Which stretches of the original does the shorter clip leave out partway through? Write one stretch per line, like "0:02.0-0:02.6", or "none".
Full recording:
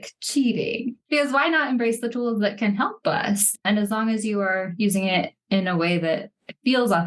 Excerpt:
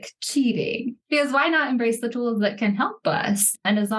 none